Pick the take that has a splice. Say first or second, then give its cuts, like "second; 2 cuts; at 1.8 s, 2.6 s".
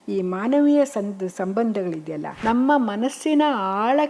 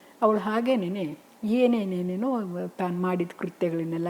first; 1 cut; at 2.4 s